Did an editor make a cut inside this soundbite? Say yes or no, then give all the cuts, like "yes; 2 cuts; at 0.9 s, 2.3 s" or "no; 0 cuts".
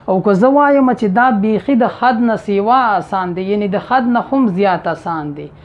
no; 0 cuts